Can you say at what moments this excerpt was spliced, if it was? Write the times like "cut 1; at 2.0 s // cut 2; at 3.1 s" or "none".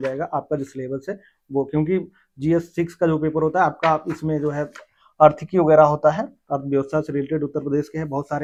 none